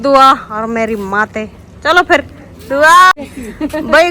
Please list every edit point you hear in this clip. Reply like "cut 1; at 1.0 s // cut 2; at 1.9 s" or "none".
none